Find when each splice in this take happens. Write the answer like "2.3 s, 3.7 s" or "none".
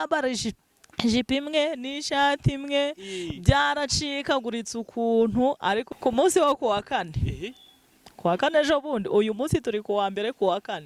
5.9 s